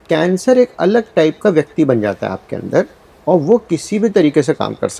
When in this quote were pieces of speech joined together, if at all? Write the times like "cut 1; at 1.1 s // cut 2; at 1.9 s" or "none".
none